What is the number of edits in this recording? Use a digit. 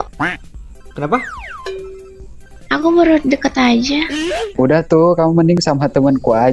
1